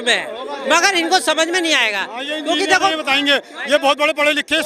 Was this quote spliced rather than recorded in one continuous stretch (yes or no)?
no